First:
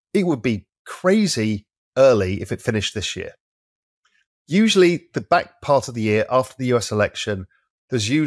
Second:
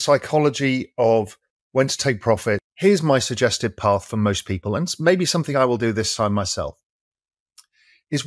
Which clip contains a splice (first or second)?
second